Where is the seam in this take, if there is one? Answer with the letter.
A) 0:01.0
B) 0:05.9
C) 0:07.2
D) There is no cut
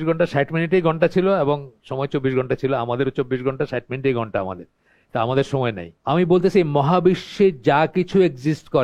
B